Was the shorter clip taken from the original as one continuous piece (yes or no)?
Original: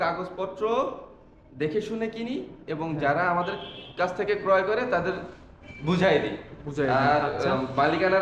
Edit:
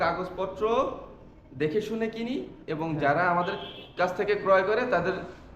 yes